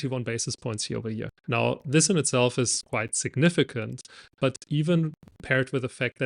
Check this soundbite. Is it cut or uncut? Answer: cut